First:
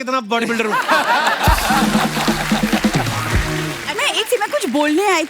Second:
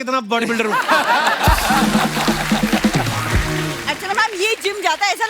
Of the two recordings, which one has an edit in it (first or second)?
first